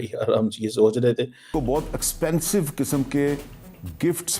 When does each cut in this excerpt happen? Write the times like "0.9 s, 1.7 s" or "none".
1.5 s